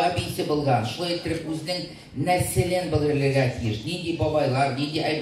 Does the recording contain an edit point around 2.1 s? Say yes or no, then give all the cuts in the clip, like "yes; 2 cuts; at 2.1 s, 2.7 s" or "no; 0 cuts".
no; 0 cuts